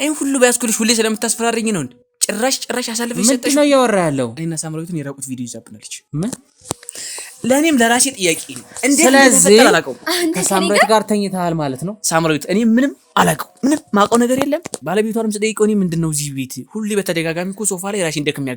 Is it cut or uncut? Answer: cut